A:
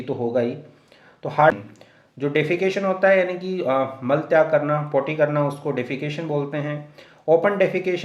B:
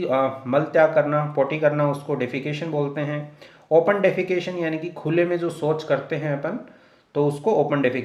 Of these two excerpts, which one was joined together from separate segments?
A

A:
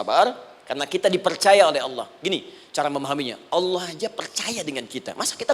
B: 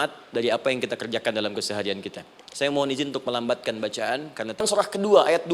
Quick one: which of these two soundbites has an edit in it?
B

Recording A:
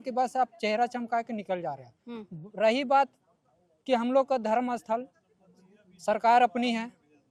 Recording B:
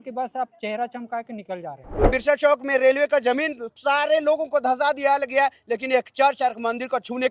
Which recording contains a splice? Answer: B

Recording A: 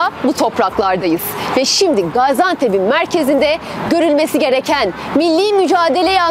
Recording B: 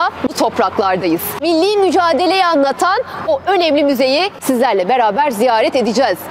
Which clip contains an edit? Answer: B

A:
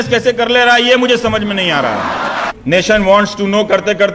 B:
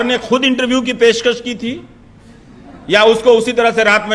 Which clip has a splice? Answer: A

